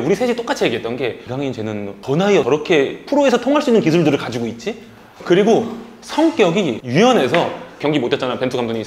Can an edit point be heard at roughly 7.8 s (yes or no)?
yes